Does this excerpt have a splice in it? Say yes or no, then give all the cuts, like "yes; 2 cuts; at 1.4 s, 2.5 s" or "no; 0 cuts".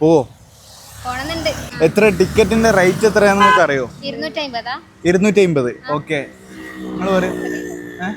yes; 1 cut; at 1.7 s